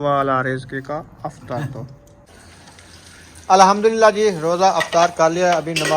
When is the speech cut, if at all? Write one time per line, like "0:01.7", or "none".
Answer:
0:02.3